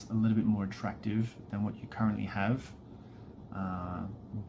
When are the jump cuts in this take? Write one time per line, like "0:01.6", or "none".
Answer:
none